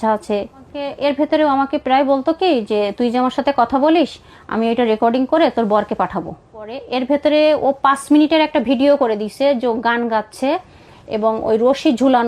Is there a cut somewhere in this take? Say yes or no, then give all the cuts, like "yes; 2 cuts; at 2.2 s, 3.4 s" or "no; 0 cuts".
yes; 2 cuts; at 0.9 s, 6.8 s